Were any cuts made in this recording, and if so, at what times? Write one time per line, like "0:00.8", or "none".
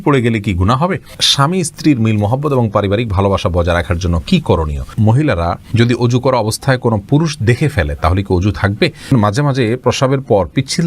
0:01.2
0:04.9
0:09.1